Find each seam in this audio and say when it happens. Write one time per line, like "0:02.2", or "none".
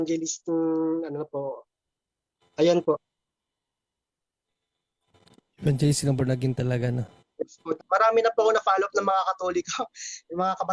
0:07.7